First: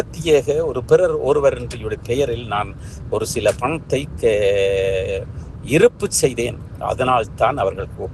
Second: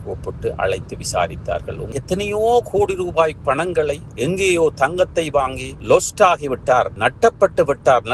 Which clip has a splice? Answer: second; 1 cut; at 1.9 s

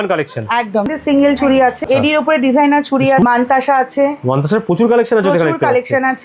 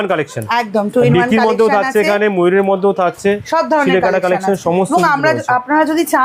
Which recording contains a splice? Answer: first; 3 cuts; at 0.9 s, 1.8 s, 3.2 s

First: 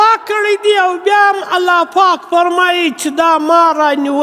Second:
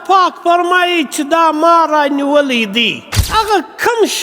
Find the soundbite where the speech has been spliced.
second; 1 cut; at 3.3 s

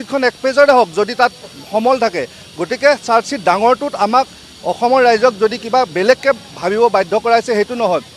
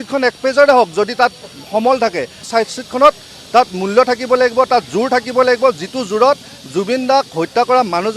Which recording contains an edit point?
second; 1 cut; at 2.5 s

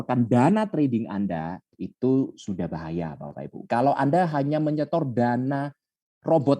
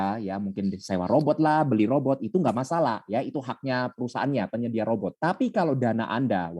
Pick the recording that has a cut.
second; 1 cut; at 5.1 s

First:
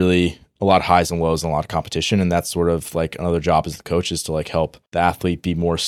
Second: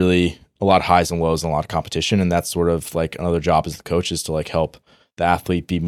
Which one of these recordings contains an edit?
first; 1 cut; at 4.8 s

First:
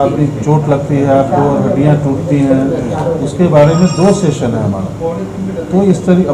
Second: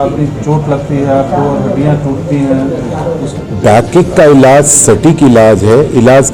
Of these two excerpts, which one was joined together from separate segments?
second; 1 cut; at 3.4 s

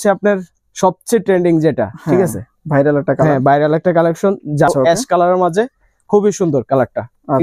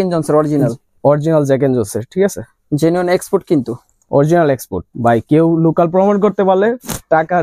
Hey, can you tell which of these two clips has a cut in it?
first; 1 cut; at 4.7 s

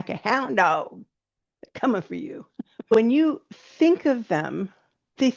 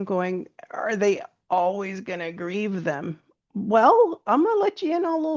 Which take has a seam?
first; 1 cut; at 2.9 s

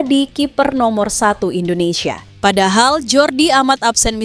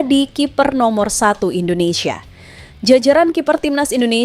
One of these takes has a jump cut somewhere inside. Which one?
first; 1 cut; at 2.3 s

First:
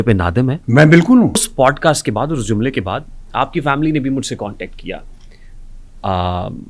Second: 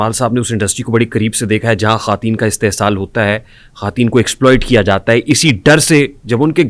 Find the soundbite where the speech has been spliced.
first; 1 cut; at 1.5 s

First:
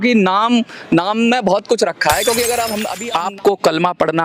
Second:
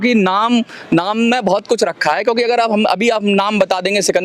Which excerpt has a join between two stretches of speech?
first; 1 cut; at 2.9 s

